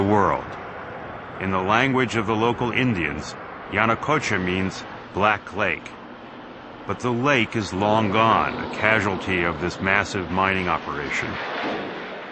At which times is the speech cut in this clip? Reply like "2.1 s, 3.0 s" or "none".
4.1 s